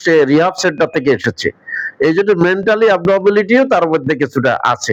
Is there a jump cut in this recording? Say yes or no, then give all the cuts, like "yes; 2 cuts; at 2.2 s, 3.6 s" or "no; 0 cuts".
no; 0 cuts